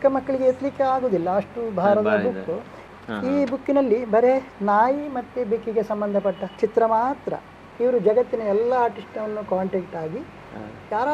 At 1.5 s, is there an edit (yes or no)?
no